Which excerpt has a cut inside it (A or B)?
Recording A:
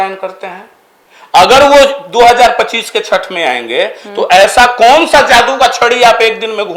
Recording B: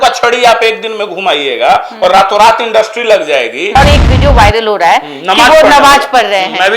B